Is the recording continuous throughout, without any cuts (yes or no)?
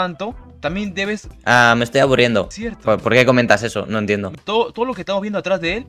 no